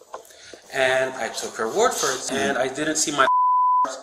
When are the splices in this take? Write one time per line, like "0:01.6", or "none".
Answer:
0:02.2